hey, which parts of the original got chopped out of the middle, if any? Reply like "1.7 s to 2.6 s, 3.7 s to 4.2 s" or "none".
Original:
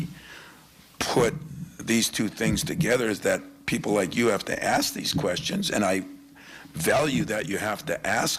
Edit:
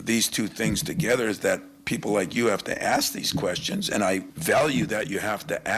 6.1 s to 6.7 s